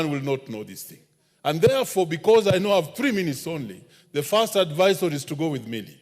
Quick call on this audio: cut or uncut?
uncut